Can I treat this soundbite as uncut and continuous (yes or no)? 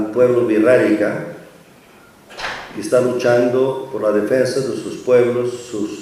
yes